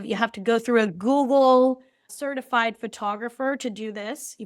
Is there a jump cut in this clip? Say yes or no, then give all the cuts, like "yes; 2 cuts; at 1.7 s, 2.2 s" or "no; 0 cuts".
yes; 1 cut; at 2.1 s